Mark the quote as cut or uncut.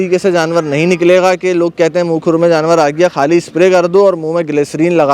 uncut